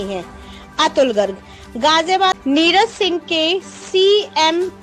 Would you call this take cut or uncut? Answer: cut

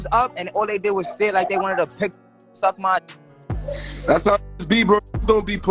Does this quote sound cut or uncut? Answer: uncut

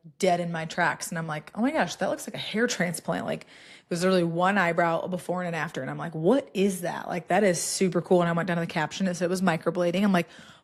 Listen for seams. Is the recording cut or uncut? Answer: uncut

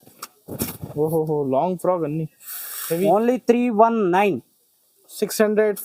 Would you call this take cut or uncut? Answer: uncut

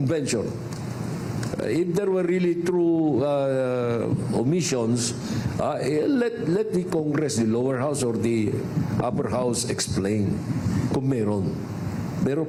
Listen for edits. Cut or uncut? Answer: uncut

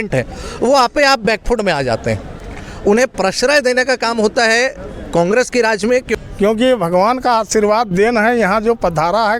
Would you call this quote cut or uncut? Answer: cut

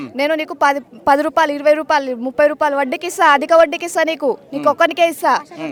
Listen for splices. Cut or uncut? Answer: uncut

